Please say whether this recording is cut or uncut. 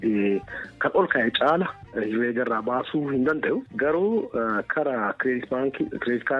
uncut